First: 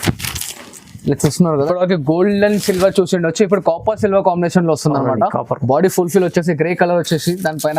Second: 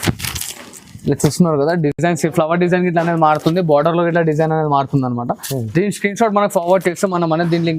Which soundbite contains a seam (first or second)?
first